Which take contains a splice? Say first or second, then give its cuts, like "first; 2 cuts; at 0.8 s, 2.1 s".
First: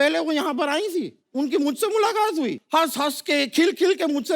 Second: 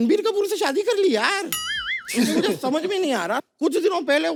first; 2 cuts; at 1.2 s, 2.6 s